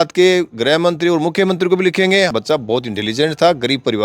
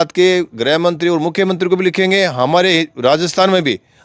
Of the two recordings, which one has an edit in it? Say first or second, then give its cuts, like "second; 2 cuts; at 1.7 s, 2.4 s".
first; 1 cut; at 2.3 s